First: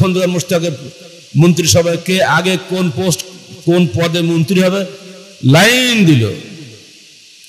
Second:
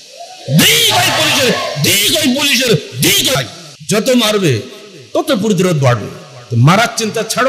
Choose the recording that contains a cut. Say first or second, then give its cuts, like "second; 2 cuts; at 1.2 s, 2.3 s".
second; 1 cut; at 3.4 s